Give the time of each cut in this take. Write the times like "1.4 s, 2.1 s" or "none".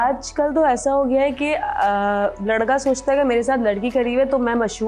none